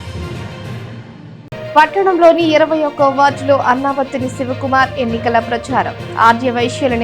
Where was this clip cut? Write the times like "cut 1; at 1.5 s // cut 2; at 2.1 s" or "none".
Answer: cut 1; at 1.3 s